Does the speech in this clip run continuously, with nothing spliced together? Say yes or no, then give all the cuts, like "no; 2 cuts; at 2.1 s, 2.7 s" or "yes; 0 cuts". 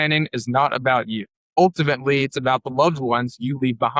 no; 1 cut; at 1.5 s